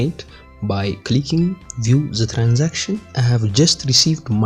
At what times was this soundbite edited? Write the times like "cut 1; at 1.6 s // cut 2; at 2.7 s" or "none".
cut 1; at 3.1 s